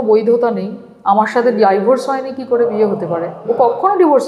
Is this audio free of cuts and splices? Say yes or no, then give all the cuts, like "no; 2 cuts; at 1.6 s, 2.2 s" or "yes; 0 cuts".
no; 1 cut; at 3.3 s